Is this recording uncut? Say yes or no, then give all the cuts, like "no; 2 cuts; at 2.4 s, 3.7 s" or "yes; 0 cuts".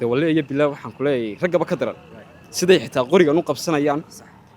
yes; 0 cuts